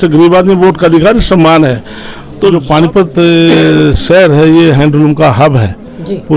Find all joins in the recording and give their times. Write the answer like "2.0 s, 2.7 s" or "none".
2.6 s

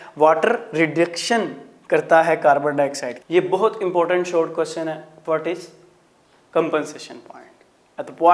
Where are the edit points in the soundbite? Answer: 3.1 s

